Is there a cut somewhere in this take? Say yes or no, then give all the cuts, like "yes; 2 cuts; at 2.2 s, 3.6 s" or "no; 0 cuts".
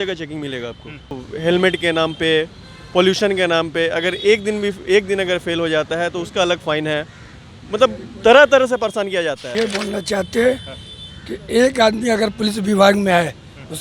yes; 2 cuts; at 1.3 s, 9.4 s